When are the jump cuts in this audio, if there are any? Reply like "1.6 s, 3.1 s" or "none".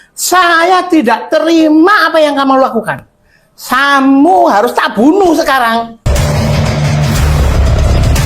6.1 s